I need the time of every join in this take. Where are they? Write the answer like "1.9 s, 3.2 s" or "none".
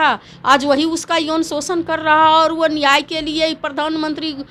none